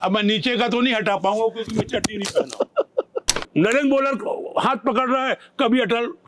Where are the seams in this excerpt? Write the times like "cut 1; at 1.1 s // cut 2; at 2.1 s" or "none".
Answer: cut 1; at 3.5 s